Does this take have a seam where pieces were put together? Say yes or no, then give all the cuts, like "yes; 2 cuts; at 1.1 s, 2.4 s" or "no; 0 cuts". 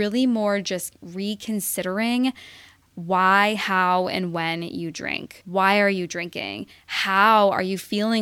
yes; 1 cut; at 5.4 s